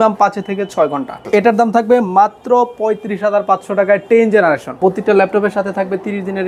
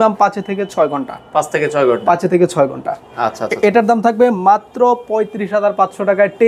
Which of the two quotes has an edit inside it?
first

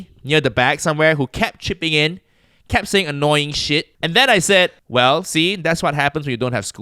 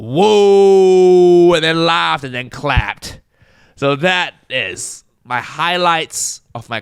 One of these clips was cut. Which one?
first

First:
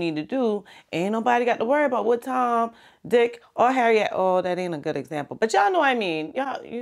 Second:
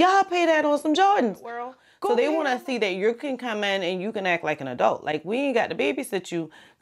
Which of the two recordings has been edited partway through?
second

